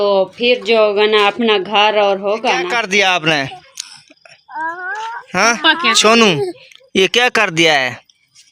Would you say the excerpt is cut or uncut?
cut